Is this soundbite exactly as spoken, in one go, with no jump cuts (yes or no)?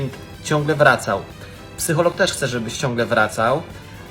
yes